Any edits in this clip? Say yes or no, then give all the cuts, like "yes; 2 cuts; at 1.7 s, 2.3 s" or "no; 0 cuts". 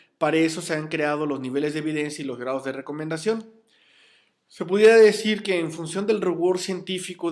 no; 0 cuts